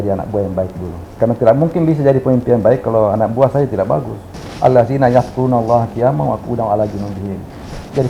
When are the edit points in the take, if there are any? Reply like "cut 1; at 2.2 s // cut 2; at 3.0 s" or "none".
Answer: cut 1; at 1.1 s // cut 2; at 4.4 s